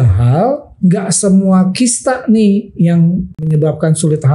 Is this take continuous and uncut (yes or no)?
no